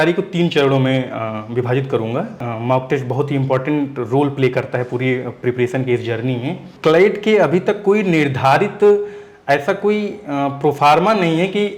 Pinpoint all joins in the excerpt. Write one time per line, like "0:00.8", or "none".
0:02.4
0:06.7